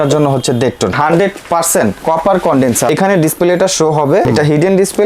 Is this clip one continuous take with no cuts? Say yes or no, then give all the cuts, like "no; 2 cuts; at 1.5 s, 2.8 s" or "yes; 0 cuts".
no; 4 cuts; at 1.0 s, 2.0 s, 2.9 s, 4.3 s